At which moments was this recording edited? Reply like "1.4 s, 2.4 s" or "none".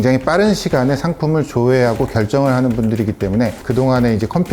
3.6 s